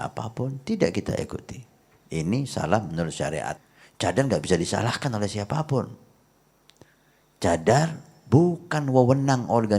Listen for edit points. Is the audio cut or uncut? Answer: cut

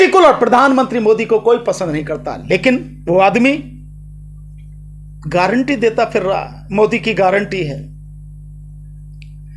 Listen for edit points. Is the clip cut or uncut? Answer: uncut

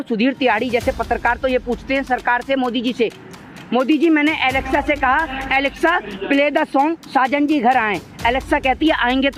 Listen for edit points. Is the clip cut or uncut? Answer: uncut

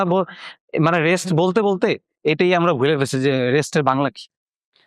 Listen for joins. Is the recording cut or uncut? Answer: uncut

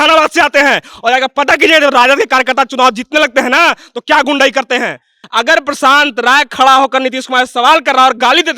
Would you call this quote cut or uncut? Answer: cut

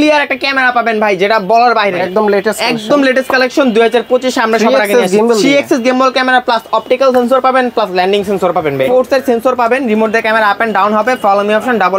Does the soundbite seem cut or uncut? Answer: cut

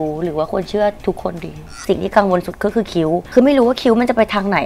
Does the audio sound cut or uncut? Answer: cut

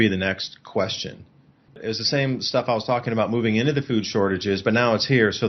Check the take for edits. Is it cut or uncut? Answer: cut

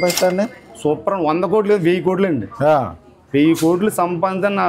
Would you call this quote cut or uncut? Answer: uncut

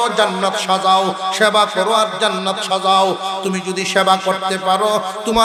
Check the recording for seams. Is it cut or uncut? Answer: uncut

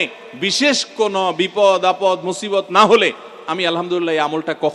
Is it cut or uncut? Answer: uncut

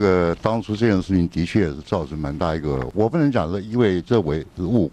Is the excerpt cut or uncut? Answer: cut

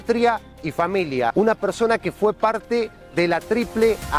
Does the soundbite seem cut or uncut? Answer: cut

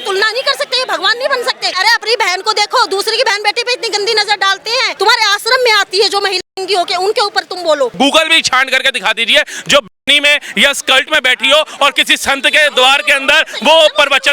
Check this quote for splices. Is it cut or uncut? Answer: cut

